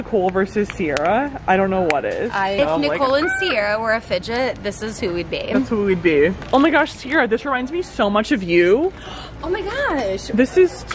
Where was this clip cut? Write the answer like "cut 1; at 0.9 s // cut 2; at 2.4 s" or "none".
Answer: cut 1; at 2.6 s // cut 2; at 6.4 s